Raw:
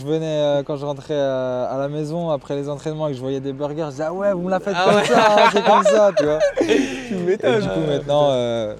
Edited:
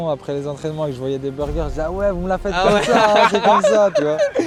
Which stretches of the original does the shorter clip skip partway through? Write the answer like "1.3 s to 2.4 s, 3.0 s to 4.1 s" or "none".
none

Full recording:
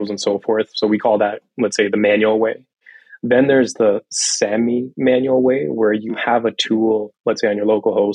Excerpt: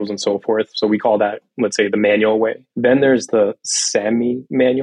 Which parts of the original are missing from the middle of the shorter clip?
2.6 s to 3.1 s

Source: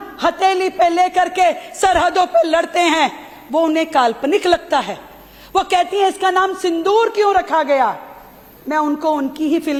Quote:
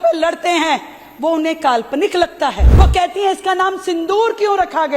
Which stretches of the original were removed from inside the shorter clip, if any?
4.9 s to 5.4 s

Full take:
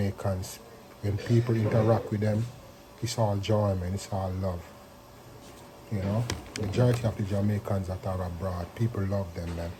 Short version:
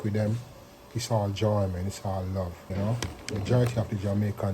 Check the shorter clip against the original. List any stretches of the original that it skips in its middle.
4.7 s to 5.9 s

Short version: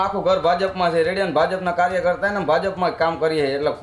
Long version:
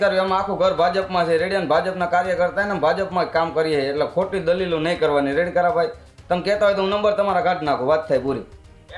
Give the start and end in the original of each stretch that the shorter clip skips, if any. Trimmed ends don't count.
none

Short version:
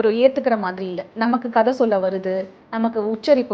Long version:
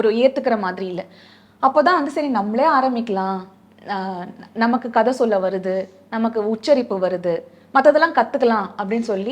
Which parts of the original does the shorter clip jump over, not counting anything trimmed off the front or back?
1.1 s to 4.5 s

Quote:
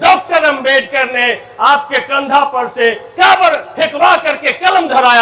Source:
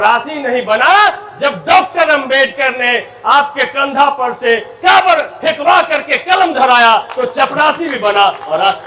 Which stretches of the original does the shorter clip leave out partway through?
none

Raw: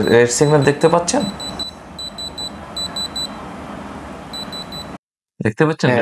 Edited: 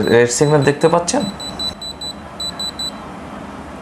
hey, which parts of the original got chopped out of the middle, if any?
1.8 s to 2.1 s

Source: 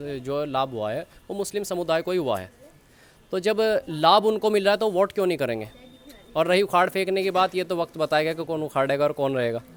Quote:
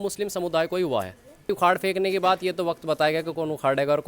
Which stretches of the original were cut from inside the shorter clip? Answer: 2.9 s to 6.6 s

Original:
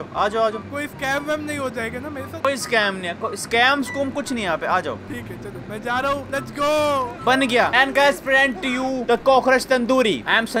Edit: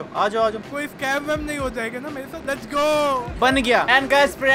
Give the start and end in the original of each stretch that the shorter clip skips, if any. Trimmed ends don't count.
2.4 s to 6.2 s

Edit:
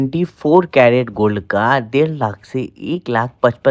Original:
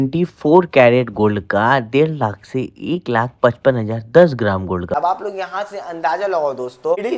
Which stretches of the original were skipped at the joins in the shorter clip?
none

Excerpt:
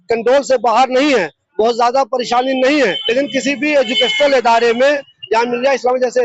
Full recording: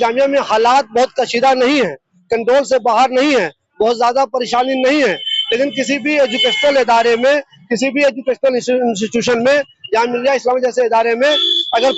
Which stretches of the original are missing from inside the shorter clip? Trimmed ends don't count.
5.2 s to 5.4 s, 7.6 s to 9.7 s

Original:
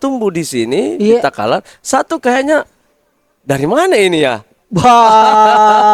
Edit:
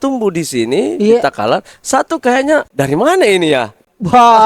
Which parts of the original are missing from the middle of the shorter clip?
2.7 s to 3.4 s

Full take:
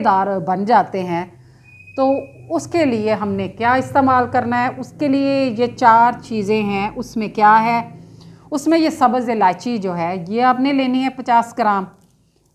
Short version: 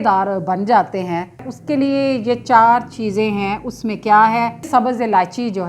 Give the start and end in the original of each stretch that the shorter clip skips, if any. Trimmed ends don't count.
1.5 s to 4.8 s, 8.0 s to 8.9 s

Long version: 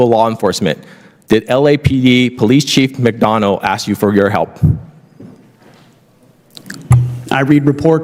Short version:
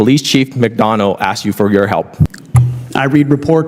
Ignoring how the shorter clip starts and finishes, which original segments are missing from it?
4.8 s to 6.8 s

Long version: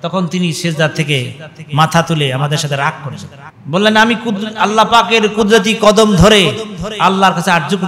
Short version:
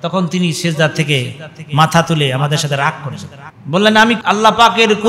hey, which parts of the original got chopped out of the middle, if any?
4.2 s to 4.5 s

